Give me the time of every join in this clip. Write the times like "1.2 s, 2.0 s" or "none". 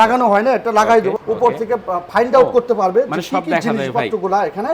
1.1 s